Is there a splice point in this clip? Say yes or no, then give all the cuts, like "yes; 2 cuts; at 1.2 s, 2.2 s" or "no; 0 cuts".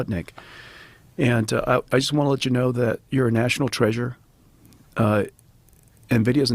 no; 0 cuts